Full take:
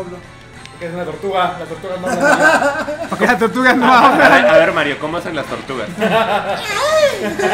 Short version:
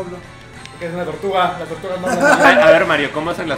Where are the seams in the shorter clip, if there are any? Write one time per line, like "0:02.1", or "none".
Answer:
0:02.4